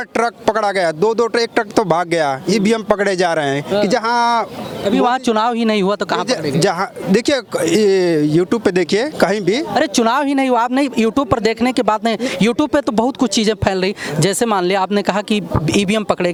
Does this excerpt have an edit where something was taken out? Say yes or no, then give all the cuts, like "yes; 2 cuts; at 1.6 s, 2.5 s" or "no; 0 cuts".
no; 0 cuts